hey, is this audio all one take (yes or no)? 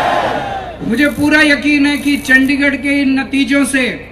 yes